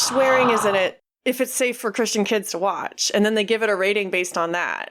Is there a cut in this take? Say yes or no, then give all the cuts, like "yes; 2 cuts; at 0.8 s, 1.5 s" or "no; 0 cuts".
no; 0 cuts